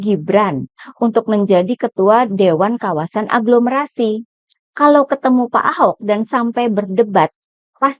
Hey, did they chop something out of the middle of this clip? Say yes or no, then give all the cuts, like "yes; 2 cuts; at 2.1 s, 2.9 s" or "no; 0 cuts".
no; 0 cuts